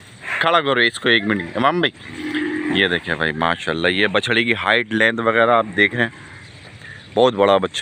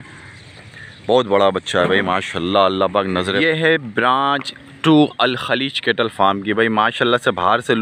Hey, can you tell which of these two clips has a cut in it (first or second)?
second